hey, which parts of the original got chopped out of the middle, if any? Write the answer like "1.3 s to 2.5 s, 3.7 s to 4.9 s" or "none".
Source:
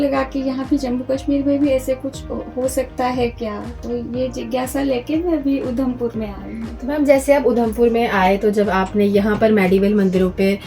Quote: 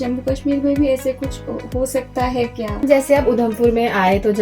3.6 s to 7.0 s